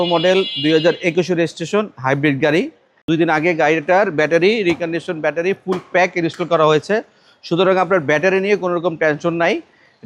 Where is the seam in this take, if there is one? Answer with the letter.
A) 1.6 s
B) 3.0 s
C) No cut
B